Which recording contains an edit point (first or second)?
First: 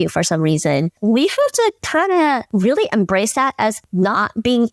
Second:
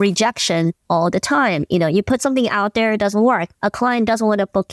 first